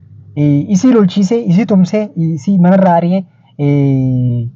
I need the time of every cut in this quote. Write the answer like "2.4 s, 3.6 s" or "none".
none